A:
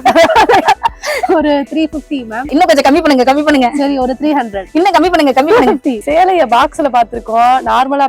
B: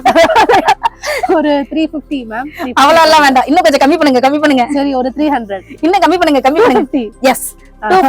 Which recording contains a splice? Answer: A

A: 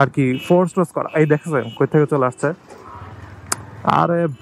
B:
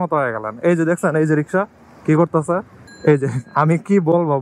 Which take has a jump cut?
B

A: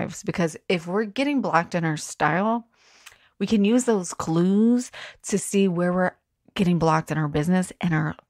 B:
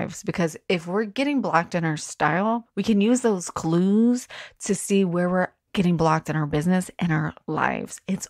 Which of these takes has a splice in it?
B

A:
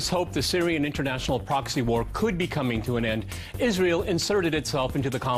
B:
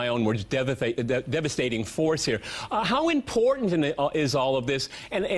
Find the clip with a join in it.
B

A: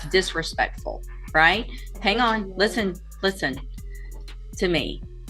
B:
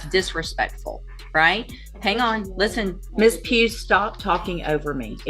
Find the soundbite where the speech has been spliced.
B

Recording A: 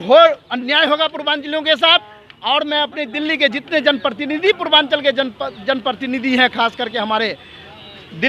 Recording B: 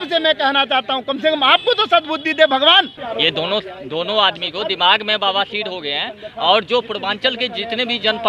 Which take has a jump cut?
B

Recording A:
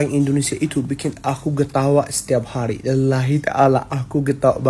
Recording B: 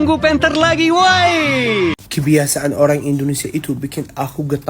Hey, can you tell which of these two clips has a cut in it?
B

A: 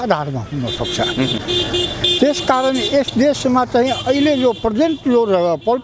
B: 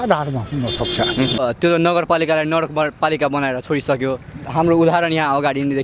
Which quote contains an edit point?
B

